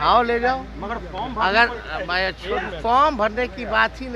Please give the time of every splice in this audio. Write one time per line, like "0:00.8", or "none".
none